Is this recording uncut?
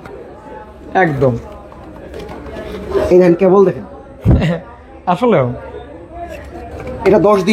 yes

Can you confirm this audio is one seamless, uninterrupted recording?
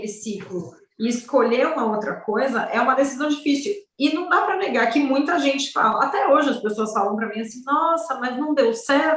yes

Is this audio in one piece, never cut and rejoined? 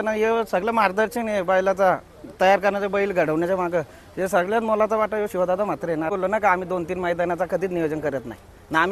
no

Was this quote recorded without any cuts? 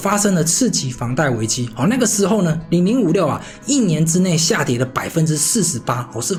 yes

